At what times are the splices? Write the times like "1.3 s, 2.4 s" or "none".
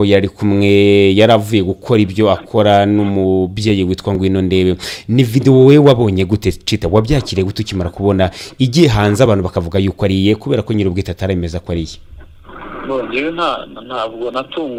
none